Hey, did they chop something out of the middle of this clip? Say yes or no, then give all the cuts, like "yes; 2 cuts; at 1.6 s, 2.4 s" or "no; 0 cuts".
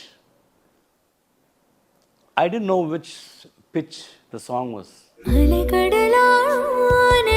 yes; 1 cut; at 5.2 s